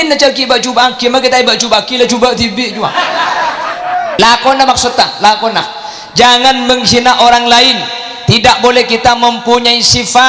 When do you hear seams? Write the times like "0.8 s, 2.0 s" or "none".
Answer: none

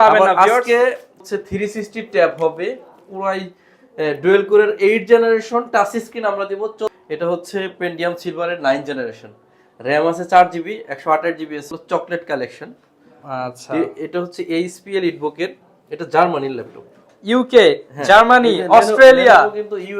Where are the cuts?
1.1 s, 6.9 s, 11.8 s, 17.0 s

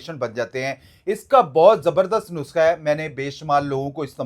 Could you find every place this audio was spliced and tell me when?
none

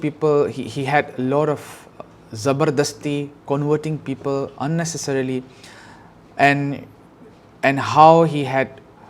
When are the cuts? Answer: none

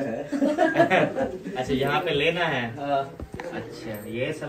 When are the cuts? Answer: none

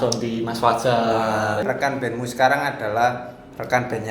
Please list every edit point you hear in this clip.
1.6 s

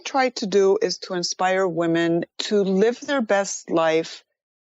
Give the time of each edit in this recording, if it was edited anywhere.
2.3 s, 3.0 s

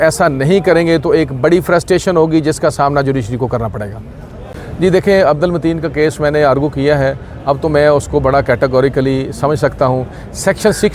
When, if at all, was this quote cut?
4.3 s

